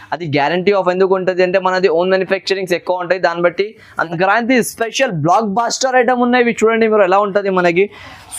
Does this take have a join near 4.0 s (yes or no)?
yes